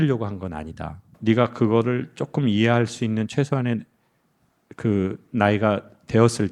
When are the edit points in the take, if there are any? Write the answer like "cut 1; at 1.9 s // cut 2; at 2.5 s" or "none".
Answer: cut 1; at 1.1 s

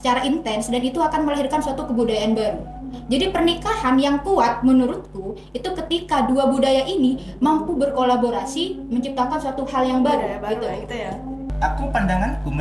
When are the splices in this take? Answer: cut 1; at 11.5 s

